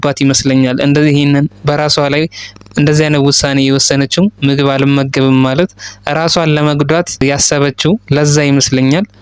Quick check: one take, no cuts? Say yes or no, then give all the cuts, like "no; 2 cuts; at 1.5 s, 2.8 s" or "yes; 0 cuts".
no; 1 cut; at 7.2 s